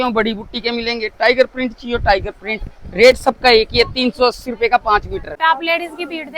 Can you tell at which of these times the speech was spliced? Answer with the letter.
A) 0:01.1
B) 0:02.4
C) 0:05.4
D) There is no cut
C